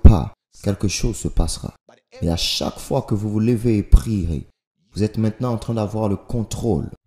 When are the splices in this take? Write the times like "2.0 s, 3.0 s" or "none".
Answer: none